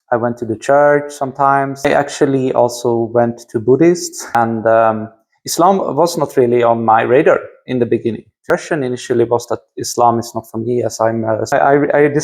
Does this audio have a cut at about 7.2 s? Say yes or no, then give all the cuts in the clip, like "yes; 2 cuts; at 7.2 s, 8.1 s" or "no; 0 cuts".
no; 4 cuts; at 1.8 s, 4.4 s, 8.4 s, 11.5 s